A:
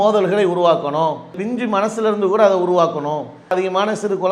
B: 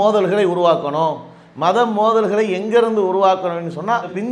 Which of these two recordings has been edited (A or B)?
A